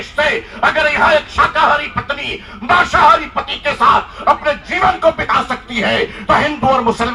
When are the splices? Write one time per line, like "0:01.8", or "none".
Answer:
none